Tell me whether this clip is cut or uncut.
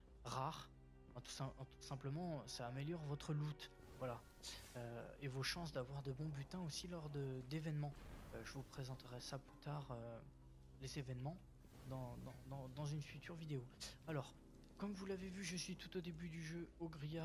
uncut